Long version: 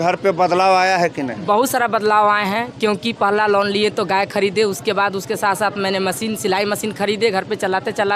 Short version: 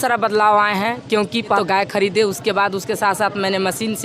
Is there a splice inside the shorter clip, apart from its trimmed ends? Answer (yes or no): yes